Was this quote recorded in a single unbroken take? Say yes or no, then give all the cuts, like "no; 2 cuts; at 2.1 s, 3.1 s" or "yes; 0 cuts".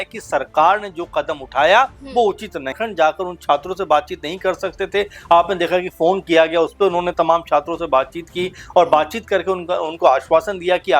no; 1 cut; at 2.8 s